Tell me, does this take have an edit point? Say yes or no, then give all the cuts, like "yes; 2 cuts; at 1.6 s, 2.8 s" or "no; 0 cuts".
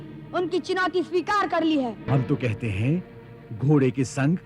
yes; 1 cut; at 2.1 s